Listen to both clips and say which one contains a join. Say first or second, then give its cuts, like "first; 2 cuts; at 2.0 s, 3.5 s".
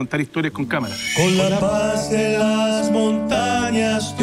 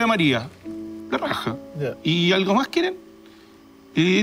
first; 1 cut; at 1.0 s